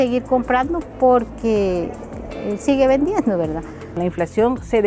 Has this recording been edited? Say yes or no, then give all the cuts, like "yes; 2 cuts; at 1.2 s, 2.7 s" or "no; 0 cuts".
yes; 1 cut; at 3.8 s